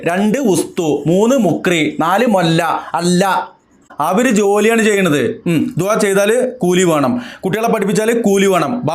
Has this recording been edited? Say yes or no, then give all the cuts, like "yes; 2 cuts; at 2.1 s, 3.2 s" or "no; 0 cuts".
yes; 1 cut; at 3.9 s